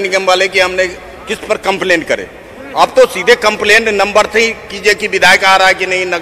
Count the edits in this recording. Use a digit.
0